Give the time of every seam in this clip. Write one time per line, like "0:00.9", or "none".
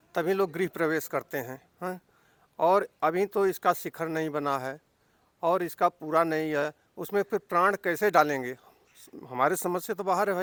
none